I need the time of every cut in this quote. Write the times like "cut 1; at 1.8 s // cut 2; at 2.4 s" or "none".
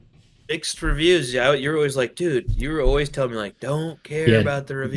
none